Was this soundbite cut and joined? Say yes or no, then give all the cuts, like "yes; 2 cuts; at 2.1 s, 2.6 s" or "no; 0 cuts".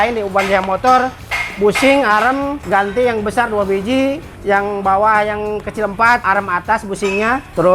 yes; 2 cuts; at 2.6 s, 6.2 s